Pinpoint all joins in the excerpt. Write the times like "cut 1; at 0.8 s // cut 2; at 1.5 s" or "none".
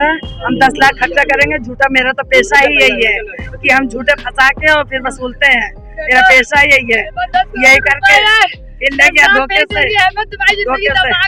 none